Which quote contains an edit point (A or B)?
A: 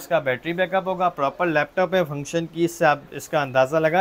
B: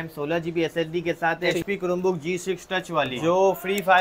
B